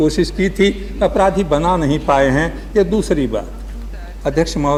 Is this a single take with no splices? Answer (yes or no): yes